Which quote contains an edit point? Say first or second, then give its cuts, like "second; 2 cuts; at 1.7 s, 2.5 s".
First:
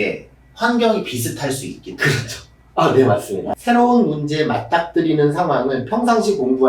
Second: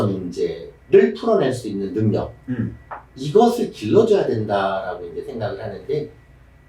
first; 1 cut; at 3.5 s